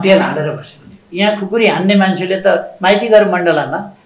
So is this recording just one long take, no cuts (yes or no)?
no